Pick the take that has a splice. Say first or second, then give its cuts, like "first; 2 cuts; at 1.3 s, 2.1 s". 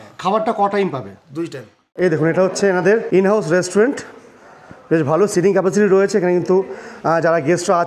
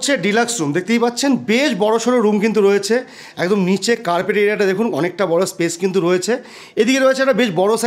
first; 2 cuts; at 1.8 s, 3.0 s